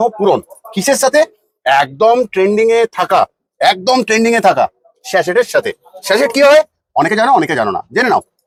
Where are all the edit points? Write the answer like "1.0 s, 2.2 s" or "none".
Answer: none